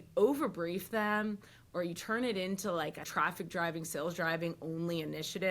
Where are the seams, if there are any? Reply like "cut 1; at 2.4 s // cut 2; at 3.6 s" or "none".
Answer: cut 1; at 3.1 s